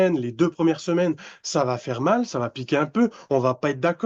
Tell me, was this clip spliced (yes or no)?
no